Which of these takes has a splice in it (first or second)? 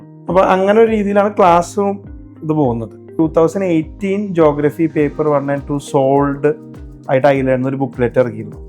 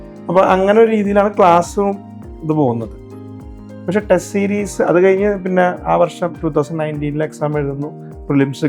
first